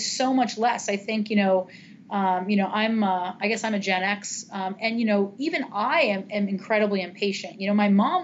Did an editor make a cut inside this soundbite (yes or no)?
no